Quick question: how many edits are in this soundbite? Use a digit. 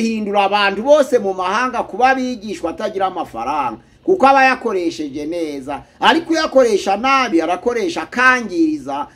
0